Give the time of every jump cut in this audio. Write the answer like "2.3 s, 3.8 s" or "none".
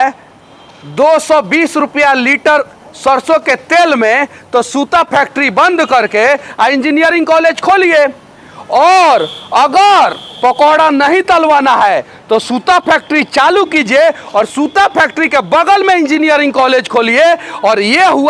none